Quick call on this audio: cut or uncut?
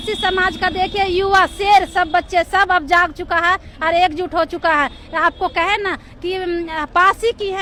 uncut